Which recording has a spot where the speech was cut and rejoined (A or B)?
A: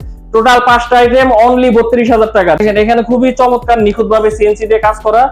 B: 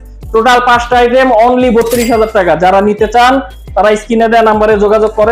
A